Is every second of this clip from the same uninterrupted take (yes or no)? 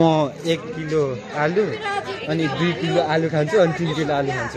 yes